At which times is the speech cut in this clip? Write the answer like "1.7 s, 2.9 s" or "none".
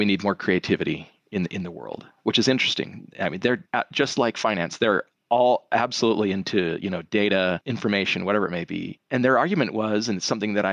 7.7 s, 8.9 s